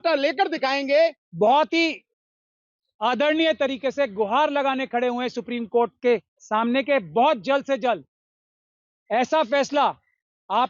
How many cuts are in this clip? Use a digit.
1